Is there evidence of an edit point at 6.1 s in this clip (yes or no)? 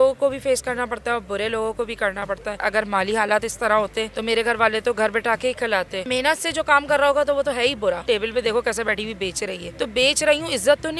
yes